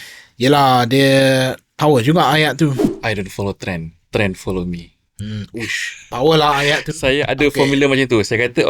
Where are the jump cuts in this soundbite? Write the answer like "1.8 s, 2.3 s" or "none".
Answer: 2.9 s

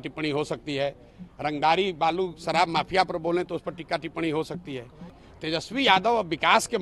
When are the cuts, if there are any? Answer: 5.1 s

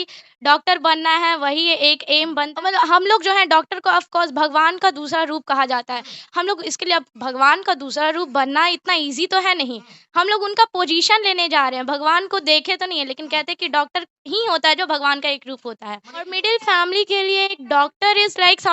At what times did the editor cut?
2.5 s, 16.4 s

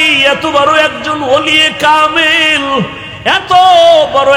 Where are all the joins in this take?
3.0 s

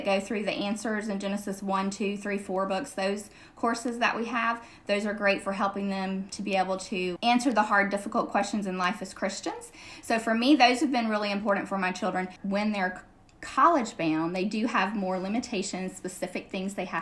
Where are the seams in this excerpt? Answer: 7.2 s, 12.3 s

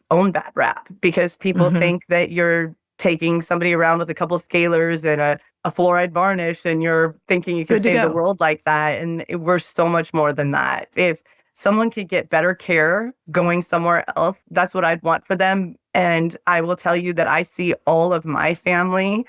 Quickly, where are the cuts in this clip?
10.9 s

